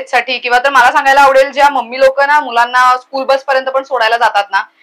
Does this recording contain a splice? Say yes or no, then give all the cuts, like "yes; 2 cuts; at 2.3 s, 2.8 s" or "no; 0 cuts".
no; 0 cuts